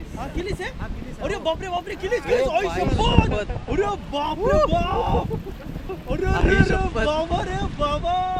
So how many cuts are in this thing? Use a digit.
0